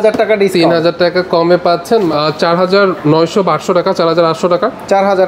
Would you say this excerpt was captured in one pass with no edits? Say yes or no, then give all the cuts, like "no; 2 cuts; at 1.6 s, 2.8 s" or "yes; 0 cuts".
no; 1 cut; at 2.1 s